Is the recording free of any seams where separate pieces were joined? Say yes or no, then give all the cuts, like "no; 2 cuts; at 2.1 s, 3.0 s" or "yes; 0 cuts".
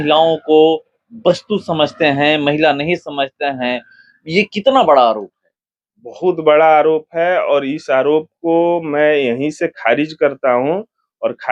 yes; 0 cuts